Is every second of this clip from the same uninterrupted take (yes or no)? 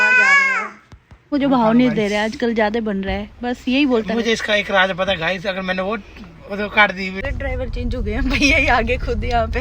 no